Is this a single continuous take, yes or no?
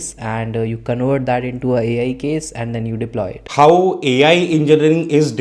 no